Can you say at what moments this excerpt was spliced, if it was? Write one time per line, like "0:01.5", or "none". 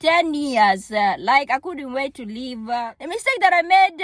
0:02.9